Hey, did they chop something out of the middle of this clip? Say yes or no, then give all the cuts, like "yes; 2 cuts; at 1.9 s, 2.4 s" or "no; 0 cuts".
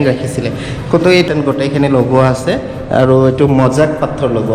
yes; 1 cut; at 1.3 s